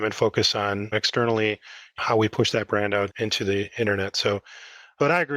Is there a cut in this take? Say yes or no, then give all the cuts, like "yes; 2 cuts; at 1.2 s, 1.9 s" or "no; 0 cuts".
yes; 1 cut; at 0.9 s